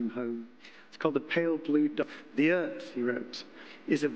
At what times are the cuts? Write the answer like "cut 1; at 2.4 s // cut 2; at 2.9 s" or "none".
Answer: cut 1; at 2.1 s